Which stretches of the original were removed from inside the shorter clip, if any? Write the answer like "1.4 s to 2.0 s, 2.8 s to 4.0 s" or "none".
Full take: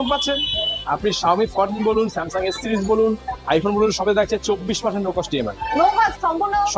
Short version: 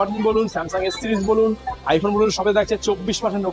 none